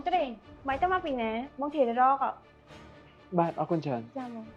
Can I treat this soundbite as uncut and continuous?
yes; 0 cuts

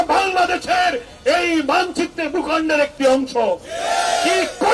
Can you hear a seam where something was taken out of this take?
no; 0 cuts

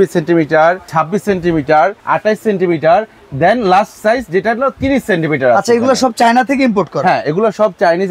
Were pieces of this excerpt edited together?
no; 0 cuts

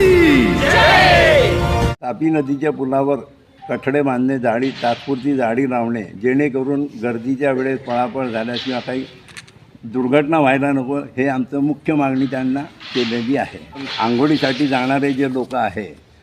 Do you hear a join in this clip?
yes; 2 cuts; at 2.0 s, 13.9 s

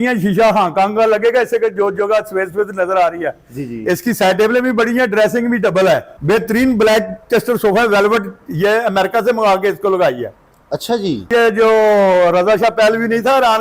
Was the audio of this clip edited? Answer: yes; 2 cuts; at 6.1 s, 11.3 s

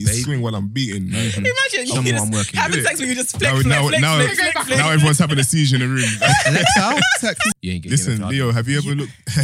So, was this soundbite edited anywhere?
yes; 1 cut; at 7.5 s

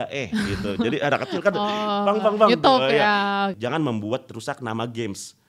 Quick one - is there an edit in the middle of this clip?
yes; 1 cut; at 3.5 s

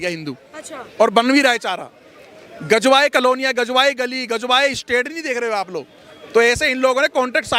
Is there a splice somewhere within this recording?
no; 0 cuts

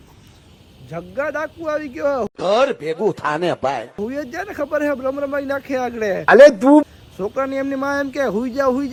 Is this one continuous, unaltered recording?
yes; 0 cuts

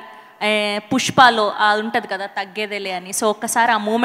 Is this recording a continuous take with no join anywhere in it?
yes; 0 cuts

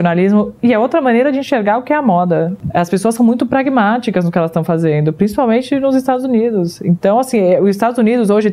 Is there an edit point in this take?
yes; 1 cut; at 2.5 s

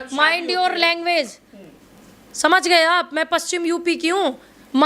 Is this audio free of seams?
yes; 0 cuts

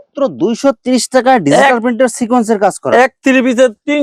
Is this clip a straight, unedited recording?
yes; 0 cuts

